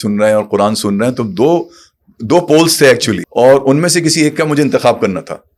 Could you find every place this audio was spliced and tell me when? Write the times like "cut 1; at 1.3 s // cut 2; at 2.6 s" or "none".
cut 1; at 3.2 s